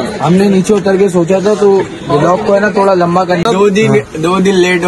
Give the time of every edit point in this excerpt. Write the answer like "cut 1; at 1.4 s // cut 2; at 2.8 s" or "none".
cut 1; at 3.4 s